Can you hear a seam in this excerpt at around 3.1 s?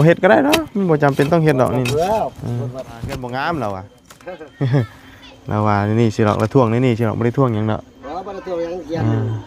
yes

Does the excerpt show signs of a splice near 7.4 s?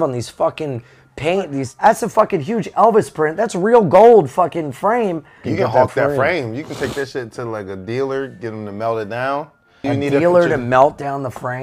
no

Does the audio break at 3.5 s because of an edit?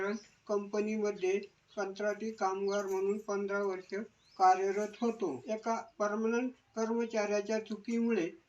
no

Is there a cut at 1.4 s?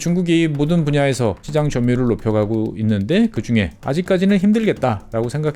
yes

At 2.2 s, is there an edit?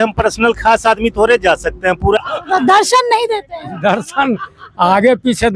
yes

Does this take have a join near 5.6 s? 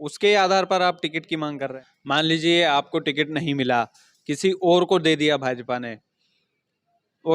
no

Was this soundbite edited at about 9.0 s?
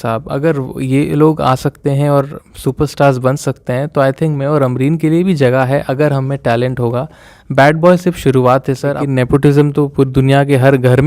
yes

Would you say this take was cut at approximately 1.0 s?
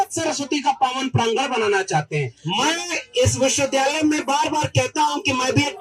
no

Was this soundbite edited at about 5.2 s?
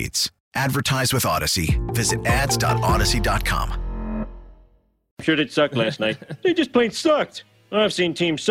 yes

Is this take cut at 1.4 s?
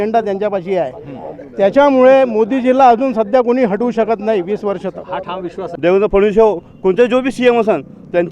no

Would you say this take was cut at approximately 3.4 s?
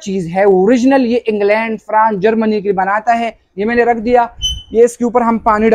yes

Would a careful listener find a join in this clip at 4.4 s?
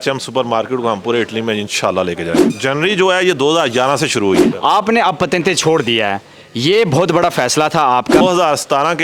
yes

